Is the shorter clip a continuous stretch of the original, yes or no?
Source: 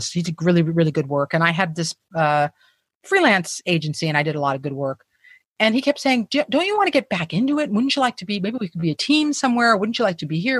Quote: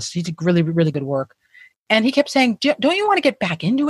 no